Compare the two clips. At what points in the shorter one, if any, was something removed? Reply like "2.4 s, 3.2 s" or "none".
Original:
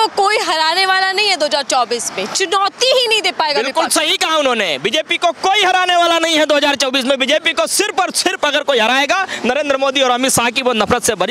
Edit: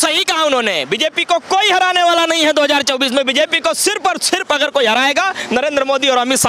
none